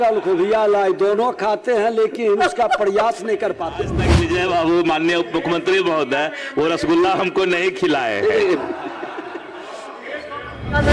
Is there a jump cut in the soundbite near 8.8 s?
no; 1 cut; at 4.0 s

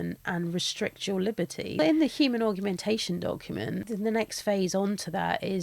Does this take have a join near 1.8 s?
yes; 2 cuts; at 1.8 s, 3.9 s

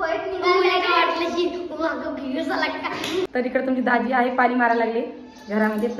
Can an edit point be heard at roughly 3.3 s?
yes; 1 cut; at 3.3 s

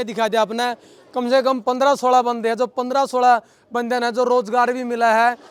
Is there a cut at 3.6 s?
no; 0 cuts

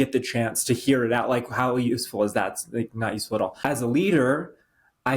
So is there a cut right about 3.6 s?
yes; 1 cut; at 3.6 s

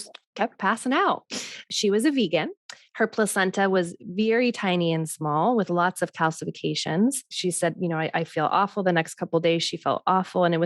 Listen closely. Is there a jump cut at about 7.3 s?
yes; 2 cuts; at 1.7 s, 7.3 s

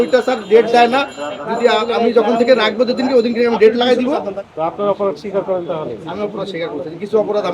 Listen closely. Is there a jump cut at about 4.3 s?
yes; 1 cut; at 4.3 s

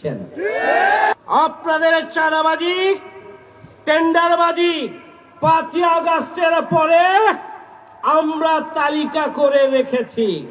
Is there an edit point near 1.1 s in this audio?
yes; 1 cut; at 1.1 s

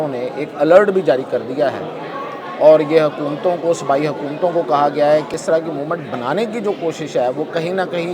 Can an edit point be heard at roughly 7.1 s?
no; 1 cut; at 5.4 s

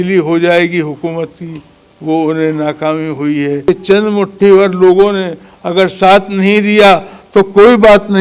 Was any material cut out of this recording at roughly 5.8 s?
no; 1 cut; at 3.6 s

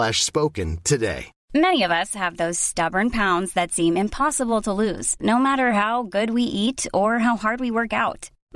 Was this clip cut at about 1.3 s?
yes; 1 cut; at 1.3 s

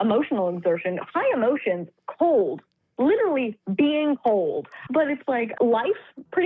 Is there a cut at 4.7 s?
yes; 1 cut; at 4.7 s

